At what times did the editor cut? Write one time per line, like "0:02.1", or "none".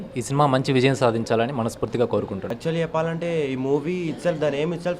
0:02.5